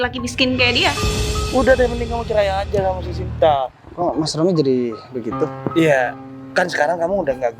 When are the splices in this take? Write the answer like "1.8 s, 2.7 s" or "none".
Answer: 1.3 s